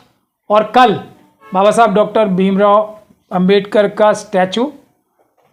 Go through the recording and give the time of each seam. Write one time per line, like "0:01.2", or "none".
none